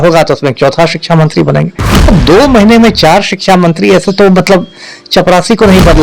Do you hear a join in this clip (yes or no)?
no